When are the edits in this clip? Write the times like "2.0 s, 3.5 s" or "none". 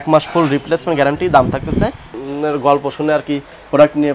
2.1 s